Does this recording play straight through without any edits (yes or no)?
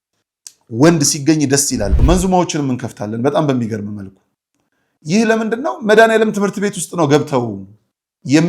no